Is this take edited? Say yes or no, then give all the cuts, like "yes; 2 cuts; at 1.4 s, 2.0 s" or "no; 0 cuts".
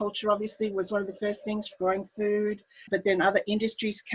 yes; 1 cut; at 2.8 s